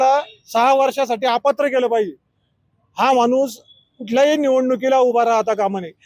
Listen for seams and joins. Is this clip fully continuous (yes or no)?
yes